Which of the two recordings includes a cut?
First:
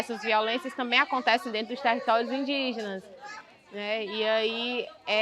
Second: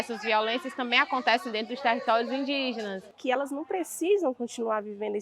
second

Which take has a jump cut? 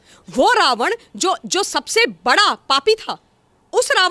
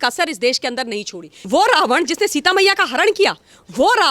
second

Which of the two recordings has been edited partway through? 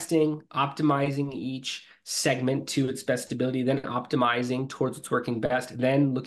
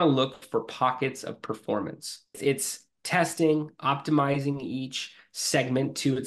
second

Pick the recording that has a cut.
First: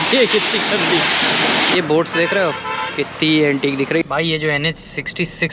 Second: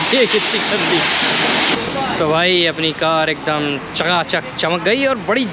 first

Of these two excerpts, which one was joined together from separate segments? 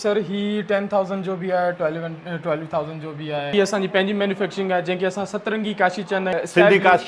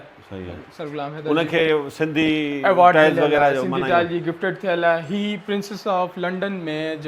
first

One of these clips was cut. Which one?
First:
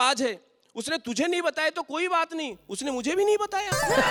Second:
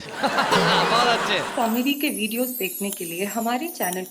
second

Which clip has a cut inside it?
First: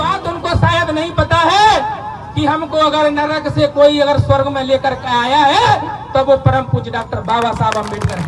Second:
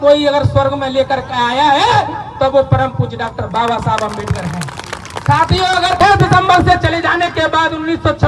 second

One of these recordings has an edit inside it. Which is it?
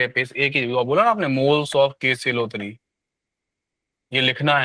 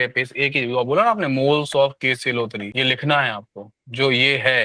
second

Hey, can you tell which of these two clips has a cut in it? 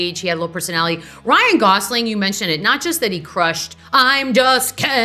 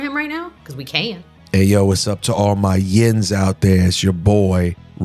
second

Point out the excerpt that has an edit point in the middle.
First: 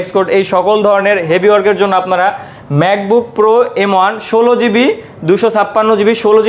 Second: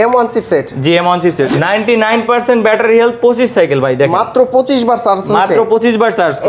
second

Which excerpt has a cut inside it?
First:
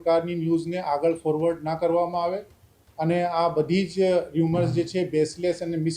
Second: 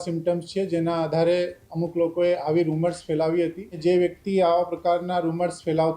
second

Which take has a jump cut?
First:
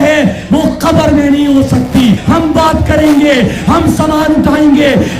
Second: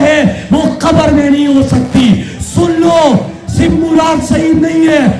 first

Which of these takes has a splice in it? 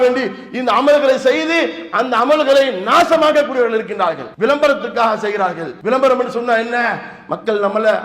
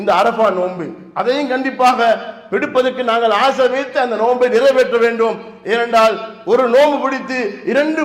first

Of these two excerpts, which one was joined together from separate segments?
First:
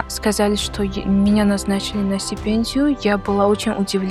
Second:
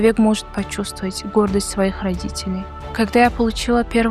second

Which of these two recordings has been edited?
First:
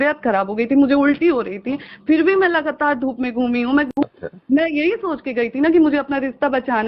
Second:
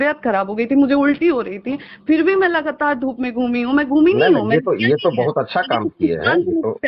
first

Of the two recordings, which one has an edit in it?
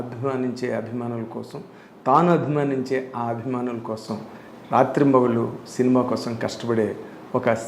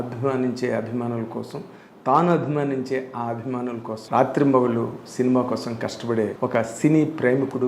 second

